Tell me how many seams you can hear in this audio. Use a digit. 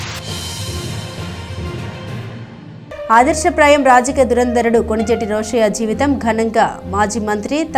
0